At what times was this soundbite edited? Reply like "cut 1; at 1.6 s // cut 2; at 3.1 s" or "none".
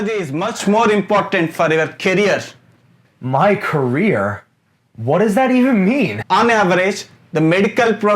cut 1; at 6.2 s